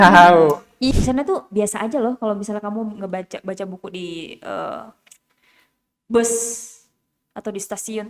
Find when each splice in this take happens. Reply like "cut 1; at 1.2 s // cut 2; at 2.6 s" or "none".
cut 1; at 0.9 s